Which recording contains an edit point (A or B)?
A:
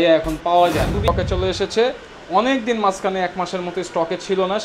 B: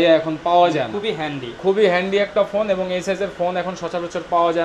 A